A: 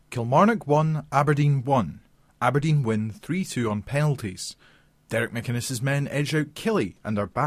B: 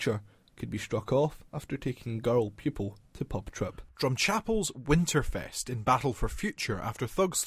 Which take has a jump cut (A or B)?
B